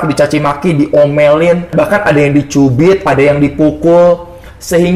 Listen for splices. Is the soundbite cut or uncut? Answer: cut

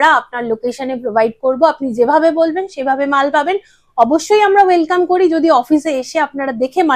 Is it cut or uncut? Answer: uncut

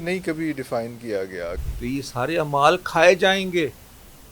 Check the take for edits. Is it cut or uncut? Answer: cut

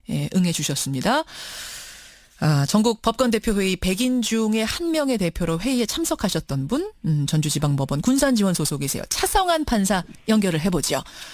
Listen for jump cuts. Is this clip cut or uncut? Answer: cut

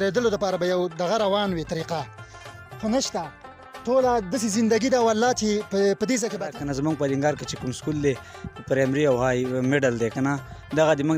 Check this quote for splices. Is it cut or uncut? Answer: cut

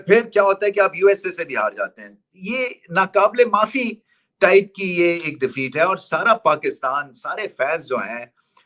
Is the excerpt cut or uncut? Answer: uncut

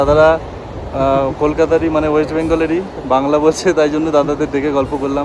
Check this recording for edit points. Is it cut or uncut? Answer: uncut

